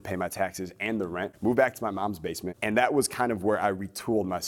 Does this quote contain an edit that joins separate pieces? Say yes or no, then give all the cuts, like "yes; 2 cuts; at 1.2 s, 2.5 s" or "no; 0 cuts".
yes; 2 cuts; at 1.3 s, 2.5 s